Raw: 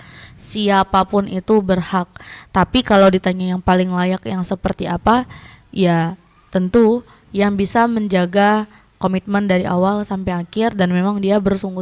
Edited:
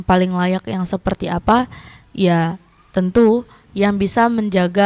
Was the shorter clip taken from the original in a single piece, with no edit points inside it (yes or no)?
yes